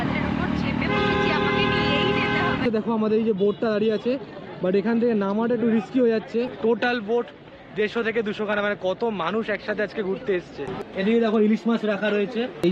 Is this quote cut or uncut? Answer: cut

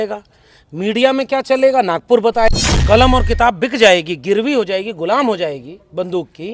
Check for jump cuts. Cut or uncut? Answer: cut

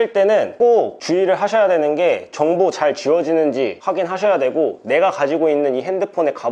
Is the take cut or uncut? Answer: uncut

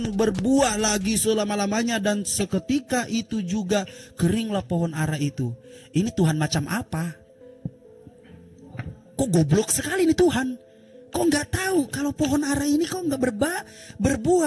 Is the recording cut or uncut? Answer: uncut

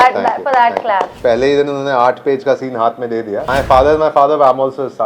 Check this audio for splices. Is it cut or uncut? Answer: cut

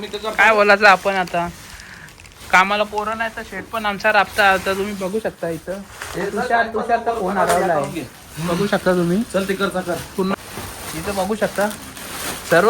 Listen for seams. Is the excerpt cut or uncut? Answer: cut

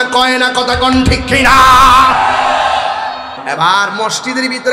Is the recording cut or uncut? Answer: cut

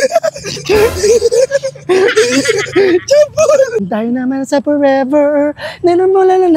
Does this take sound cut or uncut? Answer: cut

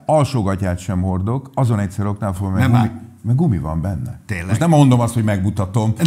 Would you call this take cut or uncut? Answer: uncut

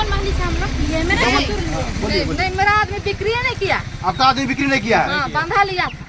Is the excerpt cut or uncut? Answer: uncut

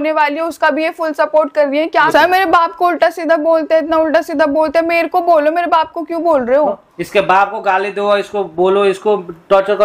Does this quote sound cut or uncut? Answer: cut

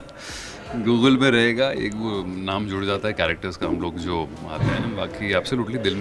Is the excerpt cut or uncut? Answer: uncut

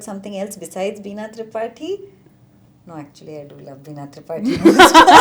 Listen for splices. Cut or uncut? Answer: uncut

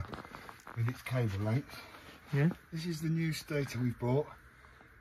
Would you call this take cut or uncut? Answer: uncut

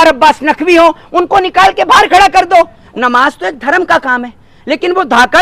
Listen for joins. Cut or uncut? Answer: cut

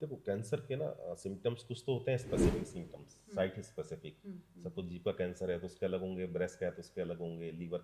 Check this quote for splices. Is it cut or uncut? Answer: uncut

